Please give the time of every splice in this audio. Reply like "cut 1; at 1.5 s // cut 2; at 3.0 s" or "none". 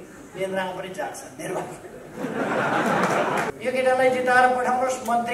cut 1; at 3.5 s